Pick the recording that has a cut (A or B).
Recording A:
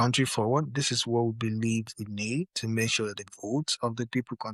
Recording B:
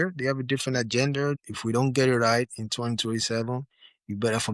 B